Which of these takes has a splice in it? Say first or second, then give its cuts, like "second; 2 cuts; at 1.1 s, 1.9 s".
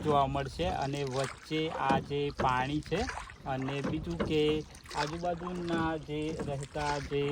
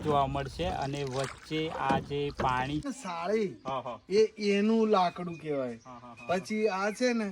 second; 1 cut; at 2.9 s